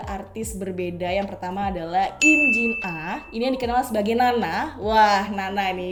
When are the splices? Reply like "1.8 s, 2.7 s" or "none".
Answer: none